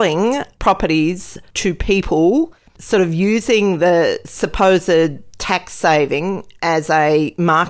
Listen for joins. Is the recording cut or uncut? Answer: uncut